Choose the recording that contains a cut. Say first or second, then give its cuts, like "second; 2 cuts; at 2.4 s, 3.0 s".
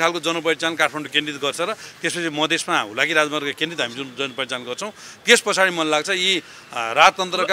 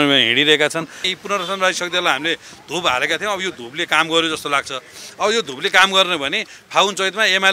second; 1 cut; at 1.0 s